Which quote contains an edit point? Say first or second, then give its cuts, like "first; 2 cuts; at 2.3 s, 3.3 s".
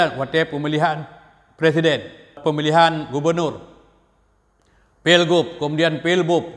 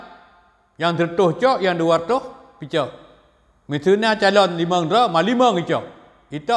first; 1 cut; at 2.4 s